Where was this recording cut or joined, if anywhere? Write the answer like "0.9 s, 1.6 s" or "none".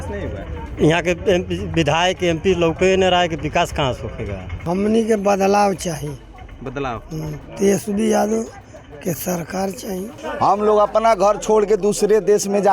4.5 s, 10.2 s